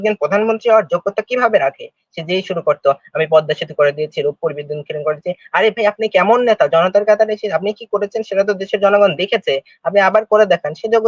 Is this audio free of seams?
yes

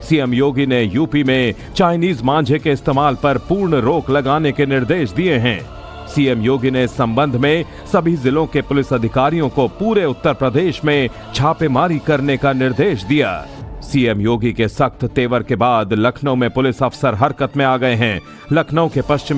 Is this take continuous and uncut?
yes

